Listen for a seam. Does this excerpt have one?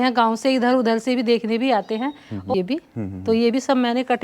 yes; 1 cut; at 2.5 s

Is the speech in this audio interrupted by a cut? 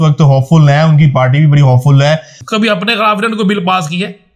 yes; 1 cut; at 2.3 s

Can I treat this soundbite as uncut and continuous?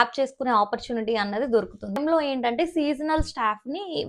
no; 1 cut; at 2.0 s

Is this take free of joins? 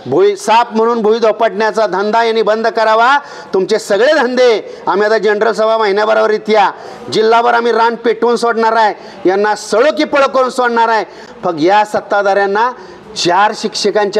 yes; 0 cuts

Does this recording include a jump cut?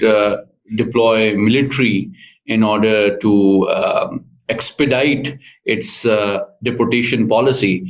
no; 0 cuts

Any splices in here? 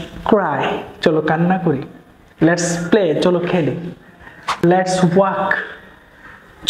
no; 0 cuts

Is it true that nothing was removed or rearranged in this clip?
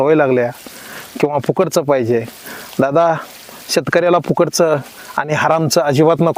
yes; 0 cuts

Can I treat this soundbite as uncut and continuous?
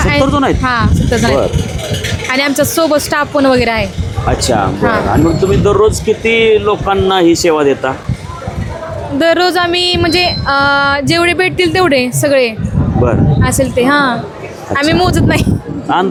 yes; 0 cuts

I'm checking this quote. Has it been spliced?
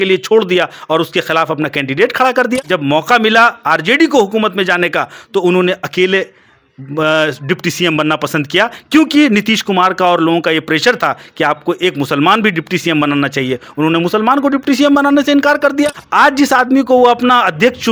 yes; 2 cuts; at 2.6 s, 16.0 s

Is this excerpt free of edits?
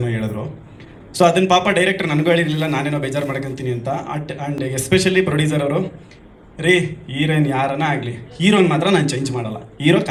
yes; 0 cuts

